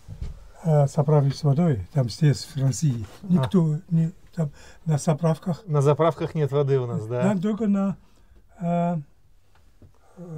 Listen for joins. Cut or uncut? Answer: uncut